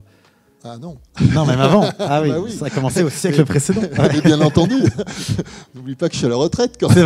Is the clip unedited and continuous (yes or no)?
yes